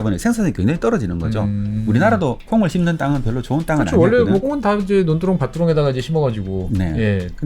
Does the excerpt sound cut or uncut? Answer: cut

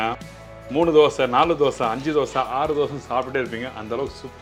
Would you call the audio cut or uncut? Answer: uncut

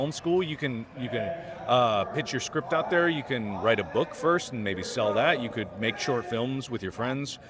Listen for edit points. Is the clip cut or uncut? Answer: uncut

